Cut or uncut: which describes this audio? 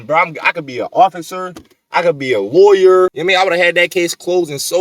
cut